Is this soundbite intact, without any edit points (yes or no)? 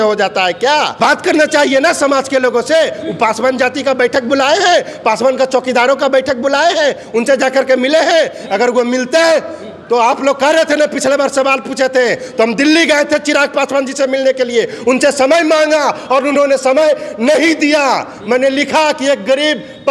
yes